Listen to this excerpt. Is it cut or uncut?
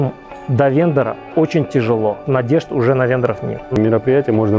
cut